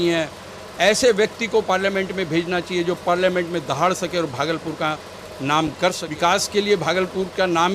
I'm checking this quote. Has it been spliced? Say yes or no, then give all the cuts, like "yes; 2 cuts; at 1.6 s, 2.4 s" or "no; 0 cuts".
yes; 1 cut; at 6.1 s